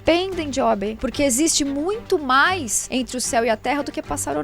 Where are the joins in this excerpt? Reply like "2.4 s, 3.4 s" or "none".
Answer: 1.0 s, 2.8 s